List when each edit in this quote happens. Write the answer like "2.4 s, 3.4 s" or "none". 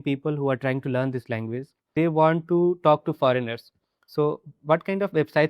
1.8 s